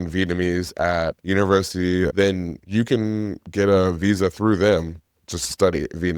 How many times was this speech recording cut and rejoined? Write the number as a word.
two